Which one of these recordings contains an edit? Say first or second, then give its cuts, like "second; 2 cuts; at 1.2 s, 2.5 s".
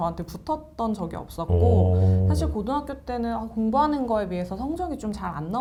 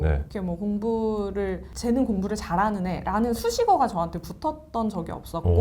second; 1 cut; at 1.7 s